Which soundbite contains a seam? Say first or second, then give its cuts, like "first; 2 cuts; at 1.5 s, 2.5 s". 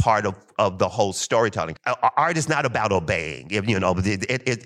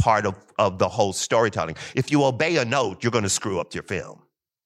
first; 1 cut; at 1.8 s